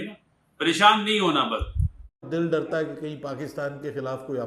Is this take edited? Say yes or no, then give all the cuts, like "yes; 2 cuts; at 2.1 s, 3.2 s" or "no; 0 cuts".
yes; 1 cut; at 2.1 s